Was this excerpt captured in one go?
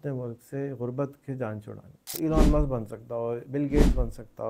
no; 1 cut; at 2.0 s

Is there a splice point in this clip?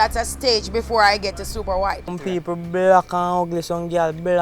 no; 0 cuts

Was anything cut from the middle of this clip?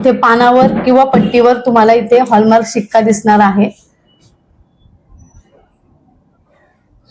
no; 0 cuts

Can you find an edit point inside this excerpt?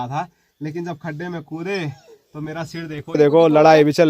yes; 1 cut; at 3.2 s

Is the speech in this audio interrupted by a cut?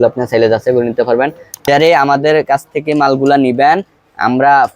yes; 1 cut; at 1.6 s

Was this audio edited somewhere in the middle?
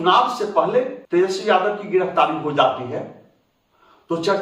no; 0 cuts

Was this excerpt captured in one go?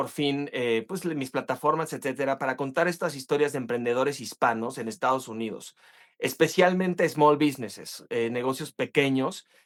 yes; 0 cuts

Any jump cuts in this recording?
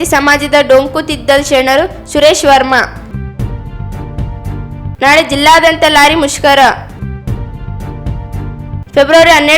yes; 2 cuts; at 6.9 s, 8.5 s

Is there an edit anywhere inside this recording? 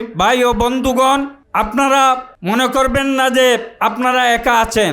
yes; 2 cuts; at 1.4 s, 2.3 s

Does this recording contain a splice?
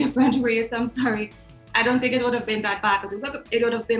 no; 0 cuts

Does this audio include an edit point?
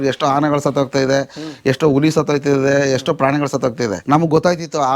yes; 1 cut; at 4.0 s

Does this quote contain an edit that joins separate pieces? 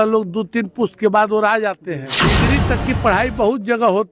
yes; 1 cut; at 2.4 s

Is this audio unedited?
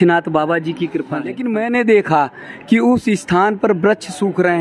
no; 1 cut; at 1.4 s

